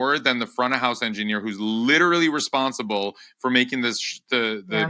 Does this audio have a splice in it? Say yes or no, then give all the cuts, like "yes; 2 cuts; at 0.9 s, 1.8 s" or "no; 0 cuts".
no; 0 cuts